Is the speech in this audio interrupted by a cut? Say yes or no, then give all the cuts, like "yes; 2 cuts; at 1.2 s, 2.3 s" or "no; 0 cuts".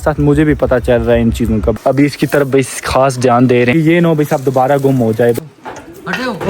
yes; 3 cuts; at 1.7 s, 3.7 s, 5.4 s